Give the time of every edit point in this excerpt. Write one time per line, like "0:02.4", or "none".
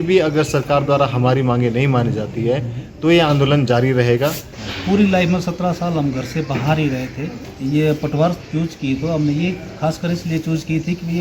0:04.5
0:07.3